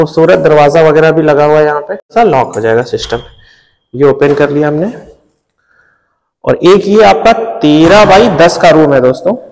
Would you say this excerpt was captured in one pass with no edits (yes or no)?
no